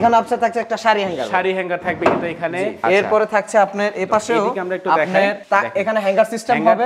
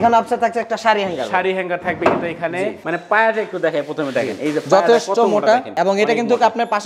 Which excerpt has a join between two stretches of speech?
second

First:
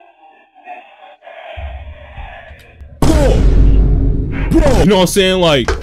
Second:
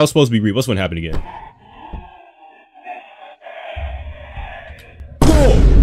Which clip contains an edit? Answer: first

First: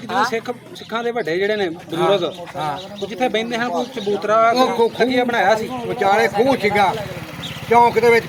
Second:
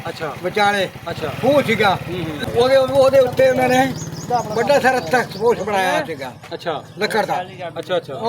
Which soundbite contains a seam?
second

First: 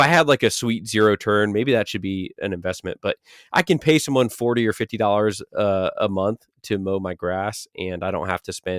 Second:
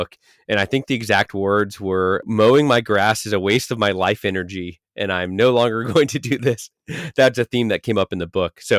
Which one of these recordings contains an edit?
second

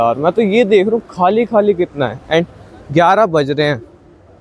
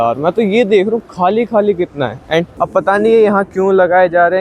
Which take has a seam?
second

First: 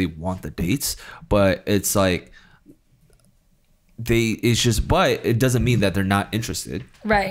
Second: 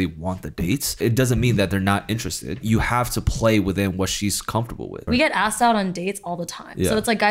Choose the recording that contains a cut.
second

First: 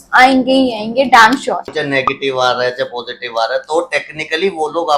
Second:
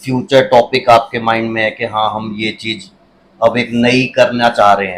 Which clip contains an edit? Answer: first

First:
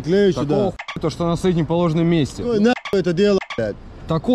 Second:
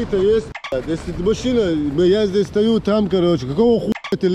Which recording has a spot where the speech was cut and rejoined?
first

